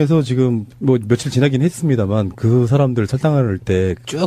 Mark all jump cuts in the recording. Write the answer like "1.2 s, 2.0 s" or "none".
3.1 s